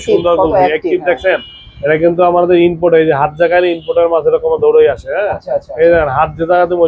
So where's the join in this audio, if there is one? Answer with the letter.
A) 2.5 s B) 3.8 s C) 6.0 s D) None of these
D